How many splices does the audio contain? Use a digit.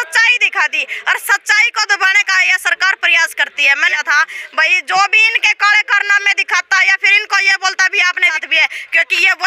2